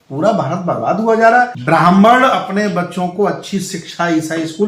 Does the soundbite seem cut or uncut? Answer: cut